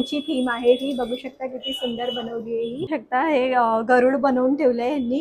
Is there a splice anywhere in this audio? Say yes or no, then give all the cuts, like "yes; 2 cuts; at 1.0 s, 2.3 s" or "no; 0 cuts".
yes; 1 cut; at 2.9 s